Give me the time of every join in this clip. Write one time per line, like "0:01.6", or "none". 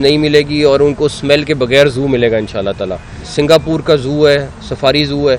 0:03.2

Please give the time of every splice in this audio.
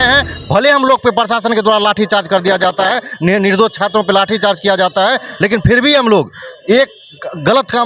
none

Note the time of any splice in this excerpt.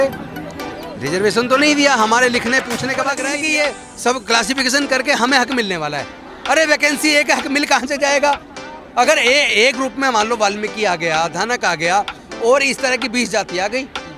0:03.3

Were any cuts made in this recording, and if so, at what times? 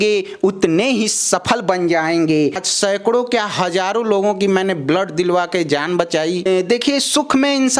0:02.5
0:06.5

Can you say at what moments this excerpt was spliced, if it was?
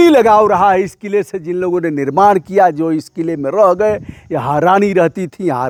none

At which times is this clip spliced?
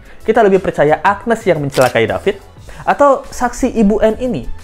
none

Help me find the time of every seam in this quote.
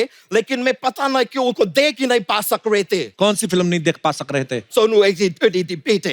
0:03.1
0:04.7

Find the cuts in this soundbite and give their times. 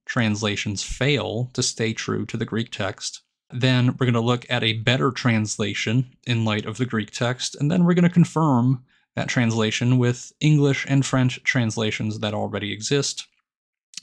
none

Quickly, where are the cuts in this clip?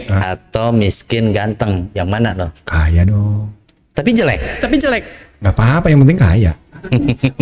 none

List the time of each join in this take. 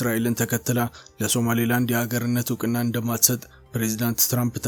none

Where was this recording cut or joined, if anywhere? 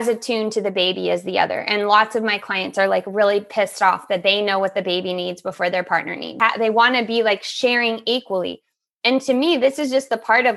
0:06.3

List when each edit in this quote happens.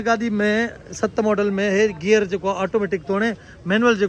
none

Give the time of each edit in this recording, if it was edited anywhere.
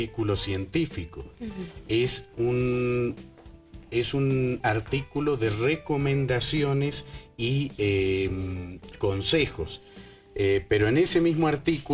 0:02.9

